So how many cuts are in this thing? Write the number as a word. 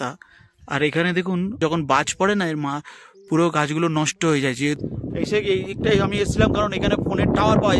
two